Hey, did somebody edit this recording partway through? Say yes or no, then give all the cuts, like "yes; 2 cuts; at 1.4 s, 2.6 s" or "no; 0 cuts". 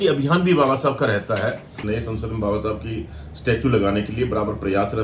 yes; 1 cut; at 1.8 s